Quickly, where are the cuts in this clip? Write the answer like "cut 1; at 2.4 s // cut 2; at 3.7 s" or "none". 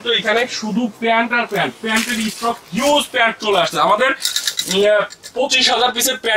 none